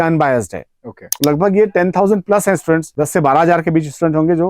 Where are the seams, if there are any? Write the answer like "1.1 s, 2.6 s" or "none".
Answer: 1.1 s, 2.9 s